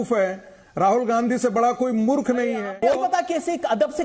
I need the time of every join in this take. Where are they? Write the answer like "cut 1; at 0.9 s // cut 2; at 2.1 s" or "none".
cut 1; at 3.0 s